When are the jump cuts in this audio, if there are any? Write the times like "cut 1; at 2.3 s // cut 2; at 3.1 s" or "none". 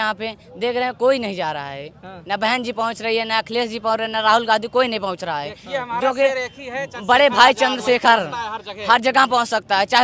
none